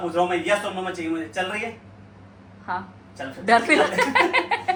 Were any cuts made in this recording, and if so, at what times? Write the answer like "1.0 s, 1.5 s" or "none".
none